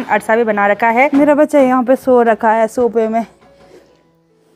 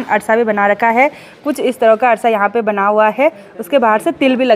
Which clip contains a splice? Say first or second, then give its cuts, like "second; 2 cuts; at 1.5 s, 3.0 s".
first; 1 cut; at 1.1 s